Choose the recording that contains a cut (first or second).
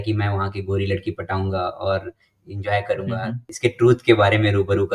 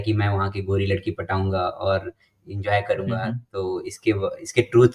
first